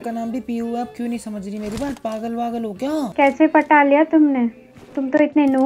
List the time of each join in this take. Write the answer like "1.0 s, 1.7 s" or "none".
3.1 s